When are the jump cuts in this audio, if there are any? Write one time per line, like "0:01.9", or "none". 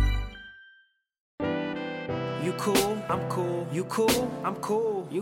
0:01.3